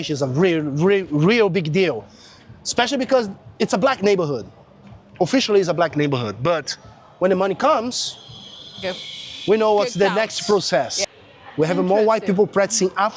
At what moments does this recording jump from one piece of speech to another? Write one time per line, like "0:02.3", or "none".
0:11.0